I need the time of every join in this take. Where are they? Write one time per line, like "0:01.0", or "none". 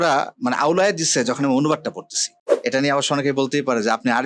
0:02.5